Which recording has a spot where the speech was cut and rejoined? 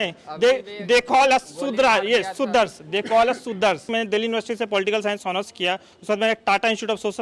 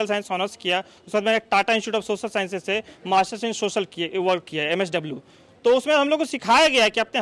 first; 1 cut; at 3.9 s

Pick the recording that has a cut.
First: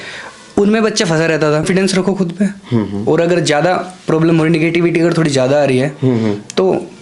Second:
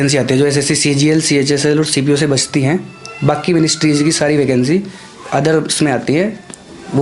first; 1 cut; at 1.7 s

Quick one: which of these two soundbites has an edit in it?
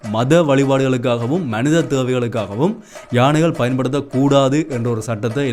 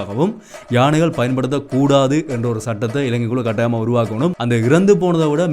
second; 1 cut; at 4.4 s

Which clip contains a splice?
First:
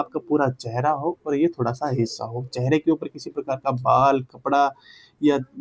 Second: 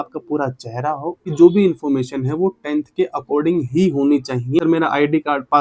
second; 2 cuts; at 1.2 s, 4.6 s

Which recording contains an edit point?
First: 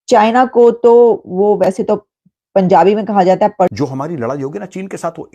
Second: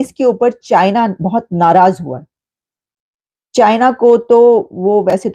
first; 1 cut; at 3.7 s

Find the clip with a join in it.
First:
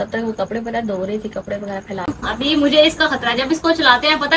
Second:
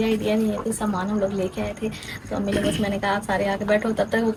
first; 1 cut; at 2.1 s

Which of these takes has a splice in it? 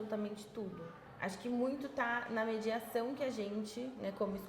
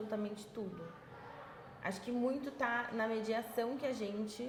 first; 1 cut; at 1.0 s

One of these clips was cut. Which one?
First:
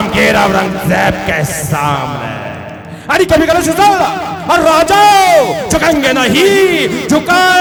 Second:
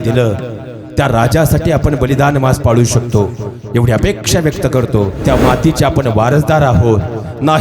second; 1 cut; at 5.2 s

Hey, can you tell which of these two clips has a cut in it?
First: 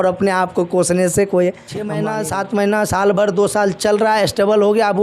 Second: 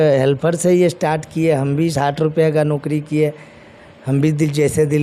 first; 1 cut; at 1.9 s

